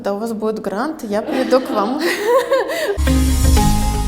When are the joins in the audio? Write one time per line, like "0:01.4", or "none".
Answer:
0:03.0